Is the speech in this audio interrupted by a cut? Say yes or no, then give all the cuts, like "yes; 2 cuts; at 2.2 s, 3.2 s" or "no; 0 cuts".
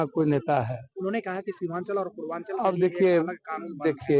no; 0 cuts